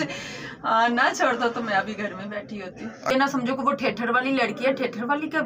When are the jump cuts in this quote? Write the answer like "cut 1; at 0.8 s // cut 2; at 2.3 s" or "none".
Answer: cut 1; at 3.1 s

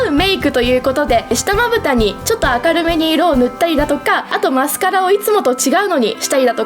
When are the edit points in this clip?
cut 1; at 1.3 s // cut 2; at 2.2 s // cut 3; at 4.3 s

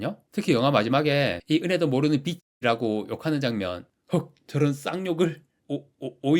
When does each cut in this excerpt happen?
cut 1; at 3.8 s

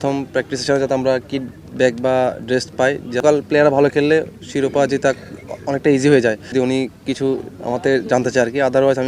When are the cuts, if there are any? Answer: cut 1; at 3.2 s // cut 2; at 6.5 s

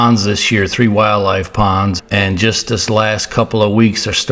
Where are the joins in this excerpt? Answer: cut 1; at 2.0 s

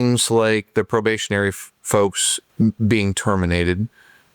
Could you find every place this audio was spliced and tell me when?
cut 1; at 2.3 s

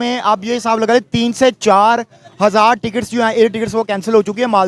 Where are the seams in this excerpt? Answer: none

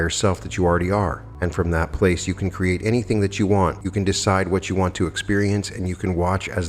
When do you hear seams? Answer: cut 1; at 1.2 s // cut 2; at 3.8 s

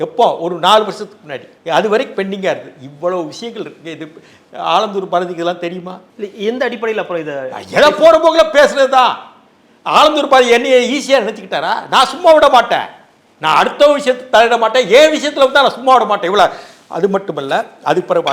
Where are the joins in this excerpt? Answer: none

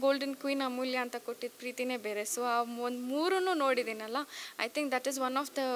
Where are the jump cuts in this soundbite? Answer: none

